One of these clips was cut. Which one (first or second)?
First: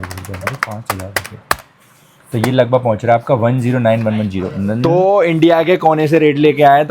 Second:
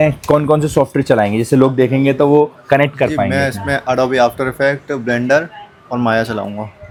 first